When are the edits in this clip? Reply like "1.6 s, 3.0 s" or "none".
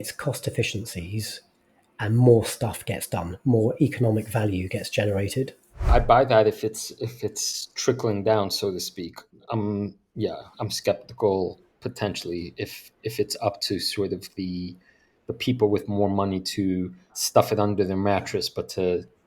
5.9 s, 17.2 s